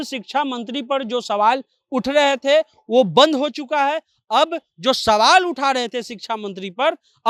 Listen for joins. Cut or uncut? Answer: uncut